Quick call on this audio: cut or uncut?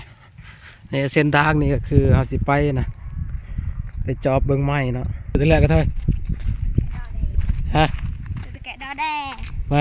cut